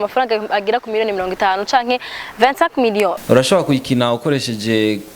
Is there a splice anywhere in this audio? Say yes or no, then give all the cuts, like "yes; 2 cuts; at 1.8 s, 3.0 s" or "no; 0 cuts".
yes; 1 cut; at 3.2 s